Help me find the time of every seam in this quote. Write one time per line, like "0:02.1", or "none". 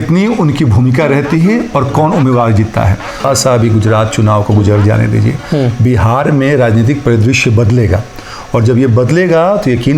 0:03.2